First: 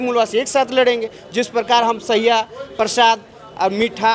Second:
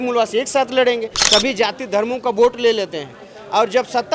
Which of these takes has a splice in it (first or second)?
second